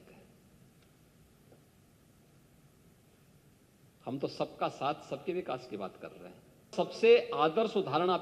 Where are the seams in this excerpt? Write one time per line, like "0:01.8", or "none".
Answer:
0:06.7